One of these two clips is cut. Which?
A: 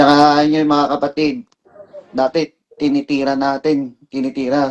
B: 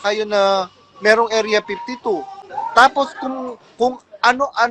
B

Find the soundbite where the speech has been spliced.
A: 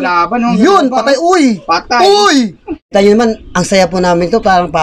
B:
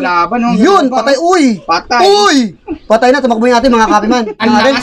A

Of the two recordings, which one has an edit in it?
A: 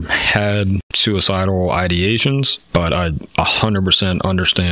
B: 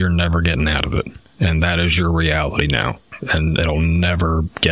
A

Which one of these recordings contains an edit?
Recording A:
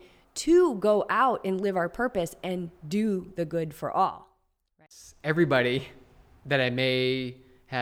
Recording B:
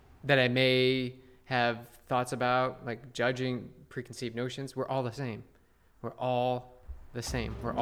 A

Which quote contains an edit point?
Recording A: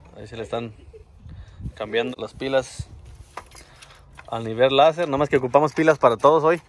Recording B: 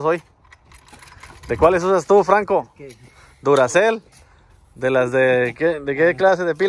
A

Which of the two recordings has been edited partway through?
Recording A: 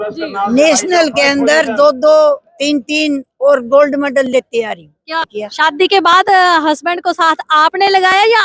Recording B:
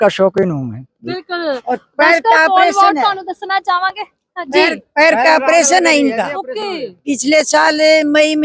A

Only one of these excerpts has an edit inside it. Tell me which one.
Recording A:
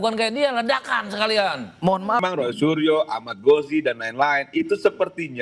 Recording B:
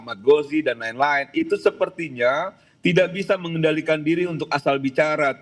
A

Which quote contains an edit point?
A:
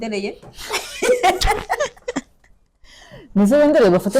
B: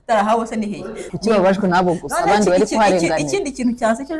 B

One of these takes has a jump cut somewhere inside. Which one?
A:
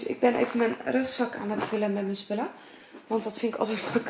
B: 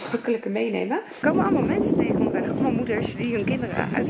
B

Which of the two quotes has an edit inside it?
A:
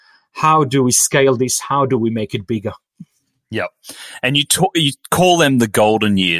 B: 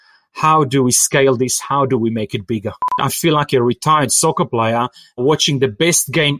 B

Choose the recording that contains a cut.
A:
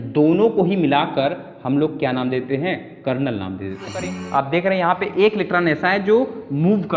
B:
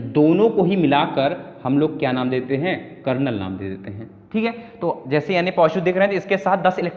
A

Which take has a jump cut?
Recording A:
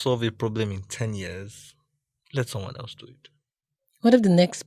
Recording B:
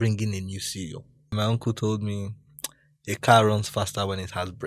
B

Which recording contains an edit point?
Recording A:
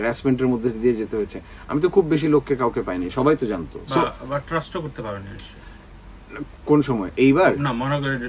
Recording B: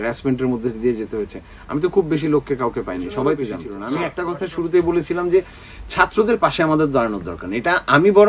B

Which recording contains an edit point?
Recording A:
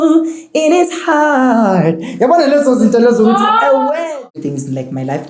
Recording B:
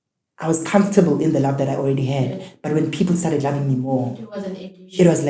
A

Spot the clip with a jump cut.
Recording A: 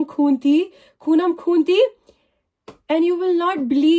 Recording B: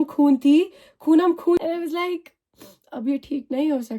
B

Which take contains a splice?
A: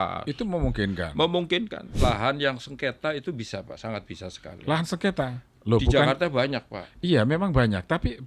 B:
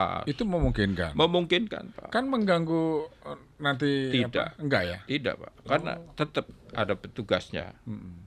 A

